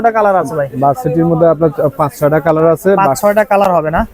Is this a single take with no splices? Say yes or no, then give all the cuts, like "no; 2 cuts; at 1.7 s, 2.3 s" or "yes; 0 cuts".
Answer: yes; 0 cuts